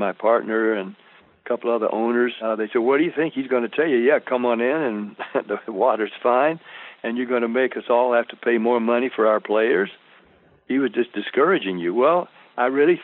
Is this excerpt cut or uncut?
cut